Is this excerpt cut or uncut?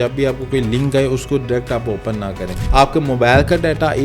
cut